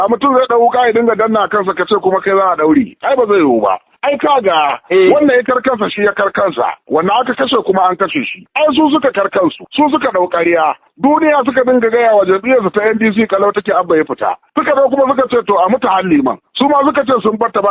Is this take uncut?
no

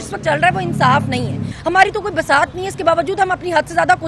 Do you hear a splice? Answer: yes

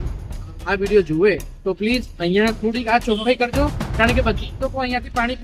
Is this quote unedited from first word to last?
yes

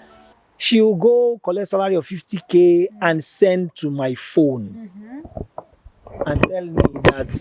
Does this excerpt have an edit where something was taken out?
no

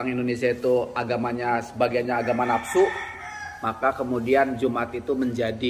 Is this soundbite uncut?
yes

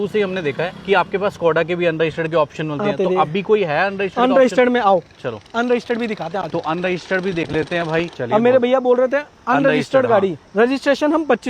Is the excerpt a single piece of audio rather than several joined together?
no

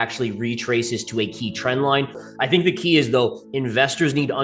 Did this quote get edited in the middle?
yes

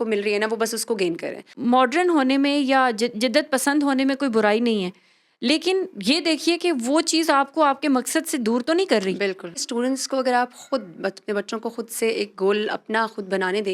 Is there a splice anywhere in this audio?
yes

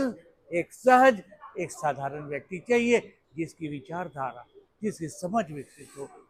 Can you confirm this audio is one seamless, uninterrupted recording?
yes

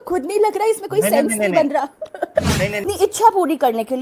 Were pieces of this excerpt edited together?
yes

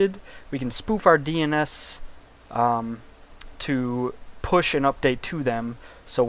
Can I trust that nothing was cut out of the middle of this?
no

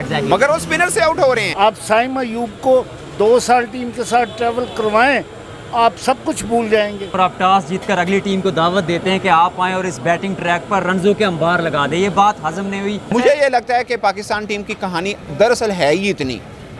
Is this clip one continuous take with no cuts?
no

